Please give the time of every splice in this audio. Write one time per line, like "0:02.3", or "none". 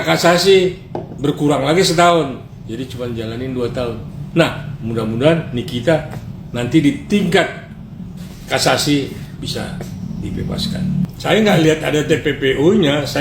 0:11.1